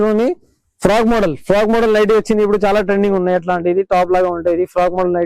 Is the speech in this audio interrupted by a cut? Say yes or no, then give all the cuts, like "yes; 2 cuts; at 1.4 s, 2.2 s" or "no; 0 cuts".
no; 0 cuts